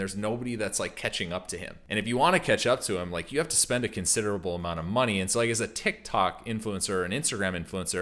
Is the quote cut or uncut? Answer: cut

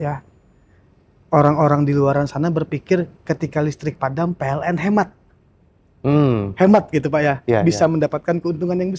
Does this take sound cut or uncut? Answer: uncut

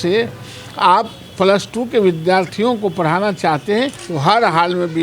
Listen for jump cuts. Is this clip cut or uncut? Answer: cut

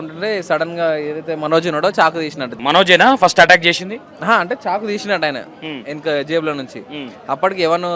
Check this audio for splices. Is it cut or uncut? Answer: cut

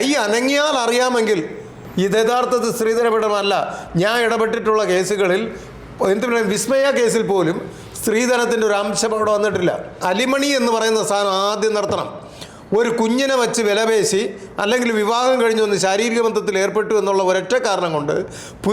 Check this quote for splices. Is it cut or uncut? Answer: cut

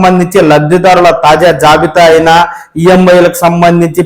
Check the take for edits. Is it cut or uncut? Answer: uncut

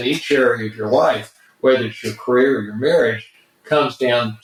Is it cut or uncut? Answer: uncut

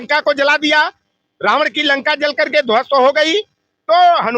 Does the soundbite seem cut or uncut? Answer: uncut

